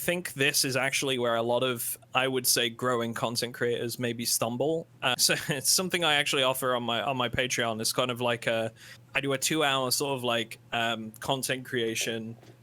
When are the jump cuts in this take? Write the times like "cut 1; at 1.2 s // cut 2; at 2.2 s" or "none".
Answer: cut 1; at 5.1 s